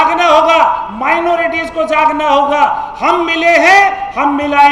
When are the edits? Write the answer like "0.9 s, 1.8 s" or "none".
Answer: none